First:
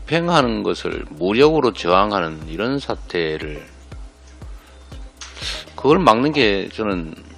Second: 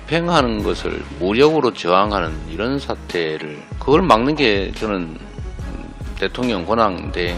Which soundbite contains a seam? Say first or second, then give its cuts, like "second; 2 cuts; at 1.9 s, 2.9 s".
second; 1 cut; at 3.6 s